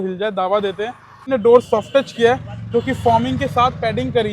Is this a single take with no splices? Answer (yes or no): no